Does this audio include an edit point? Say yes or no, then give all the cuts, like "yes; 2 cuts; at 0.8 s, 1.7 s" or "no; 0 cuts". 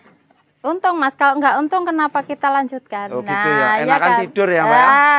no; 0 cuts